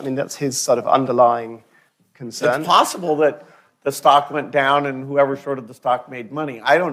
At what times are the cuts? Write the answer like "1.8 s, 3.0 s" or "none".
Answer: none